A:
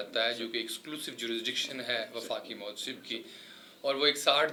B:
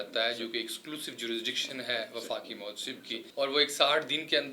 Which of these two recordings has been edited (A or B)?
B